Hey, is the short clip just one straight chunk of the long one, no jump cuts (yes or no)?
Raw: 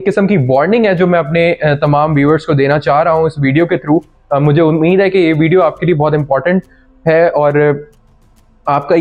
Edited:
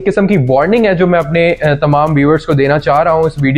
yes